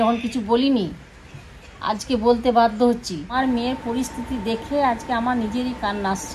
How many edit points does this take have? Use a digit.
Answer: 1